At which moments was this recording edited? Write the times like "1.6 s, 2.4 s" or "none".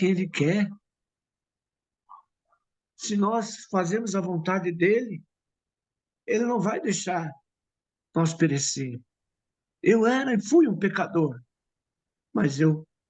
none